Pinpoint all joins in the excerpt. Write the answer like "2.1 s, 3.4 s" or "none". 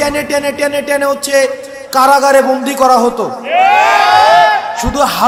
none

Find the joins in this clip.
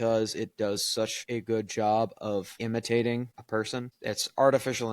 1.2 s, 2.5 s, 3.8 s

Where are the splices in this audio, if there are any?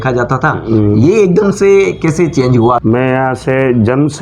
2.8 s

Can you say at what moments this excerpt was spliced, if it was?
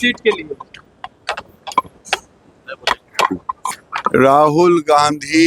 3.7 s

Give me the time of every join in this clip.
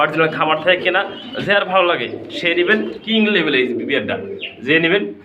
3.0 s

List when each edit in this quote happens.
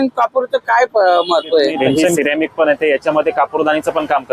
2.1 s

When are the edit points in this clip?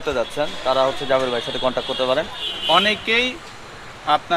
2.5 s

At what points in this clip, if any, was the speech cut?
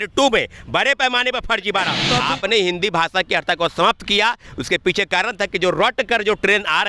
2.0 s

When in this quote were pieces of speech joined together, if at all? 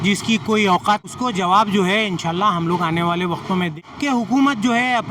1.1 s, 3.7 s

